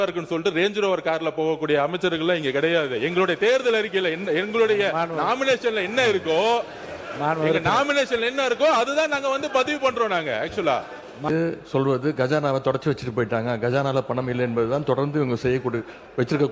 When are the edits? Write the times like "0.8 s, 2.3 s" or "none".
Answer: 11.3 s